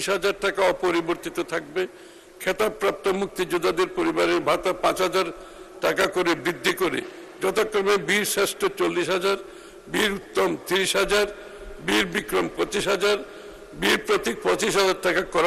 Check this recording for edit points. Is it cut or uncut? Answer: uncut